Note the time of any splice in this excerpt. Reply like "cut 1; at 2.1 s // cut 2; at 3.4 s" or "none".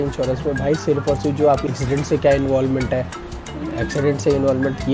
cut 1; at 1.7 s